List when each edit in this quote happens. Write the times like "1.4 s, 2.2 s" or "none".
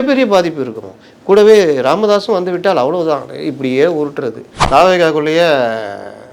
4.5 s